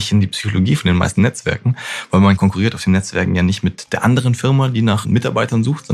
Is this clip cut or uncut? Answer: cut